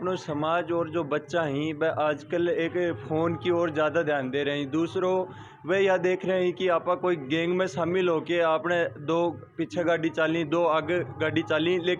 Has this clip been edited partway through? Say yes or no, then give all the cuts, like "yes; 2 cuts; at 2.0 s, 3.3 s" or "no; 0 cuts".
no; 0 cuts